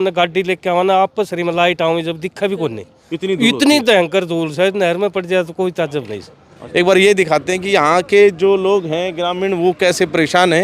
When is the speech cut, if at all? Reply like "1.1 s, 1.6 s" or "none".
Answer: 6.5 s